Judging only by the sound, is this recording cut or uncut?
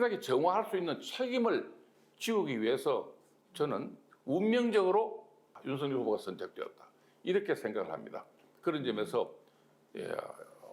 cut